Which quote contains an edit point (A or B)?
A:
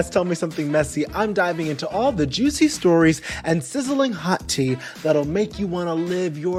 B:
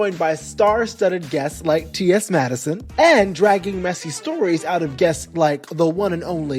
B